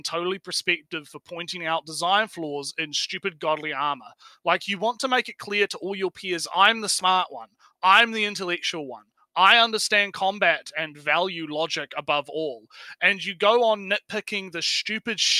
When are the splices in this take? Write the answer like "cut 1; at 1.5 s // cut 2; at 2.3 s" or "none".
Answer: none

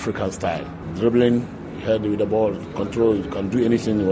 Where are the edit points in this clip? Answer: none

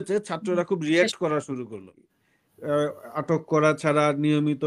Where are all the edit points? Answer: cut 1; at 1.9 s

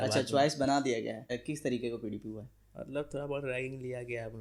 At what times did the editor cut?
cut 1; at 1.4 s

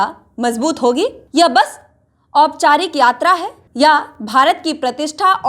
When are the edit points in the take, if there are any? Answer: cut 1; at 1.2 s // cut 2; at 3.6 s

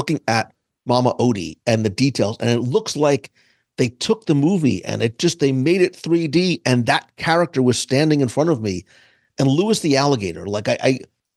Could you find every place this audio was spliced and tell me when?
none

